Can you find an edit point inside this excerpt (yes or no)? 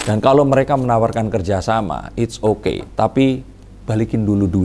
no